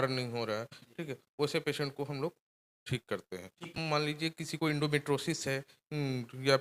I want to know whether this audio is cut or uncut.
cut